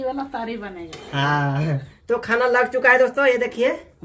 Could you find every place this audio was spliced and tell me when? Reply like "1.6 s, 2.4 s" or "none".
1.9 s

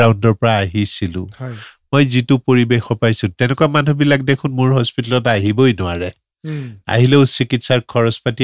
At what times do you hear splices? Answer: none

